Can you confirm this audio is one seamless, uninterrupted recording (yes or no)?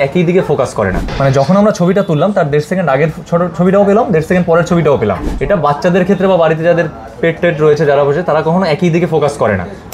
no